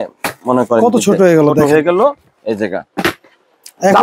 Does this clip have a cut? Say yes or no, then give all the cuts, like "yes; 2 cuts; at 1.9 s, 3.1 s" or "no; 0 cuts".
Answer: no; 0 cuts